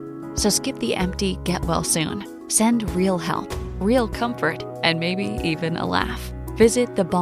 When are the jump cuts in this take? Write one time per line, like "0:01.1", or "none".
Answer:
none